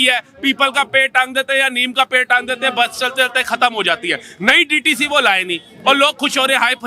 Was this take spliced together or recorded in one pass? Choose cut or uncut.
uncut